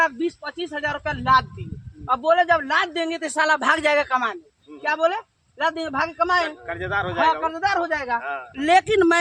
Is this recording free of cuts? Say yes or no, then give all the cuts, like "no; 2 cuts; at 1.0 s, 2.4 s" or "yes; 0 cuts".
yes; 0 cuts